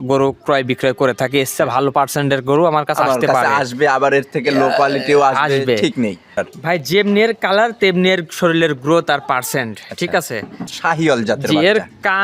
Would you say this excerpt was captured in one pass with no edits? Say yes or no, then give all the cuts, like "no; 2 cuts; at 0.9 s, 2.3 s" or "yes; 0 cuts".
no; 2 cuts; at 6.4 s, 10.7 s